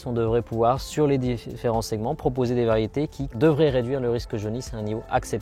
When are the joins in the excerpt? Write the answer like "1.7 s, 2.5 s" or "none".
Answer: 3.4 s